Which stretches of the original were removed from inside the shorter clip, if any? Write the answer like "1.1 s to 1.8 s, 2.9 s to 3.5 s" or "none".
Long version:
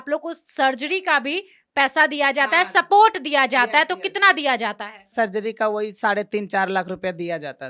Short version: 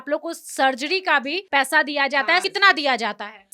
1.4 s to 1.6 s, 2.7 s to 4.0 s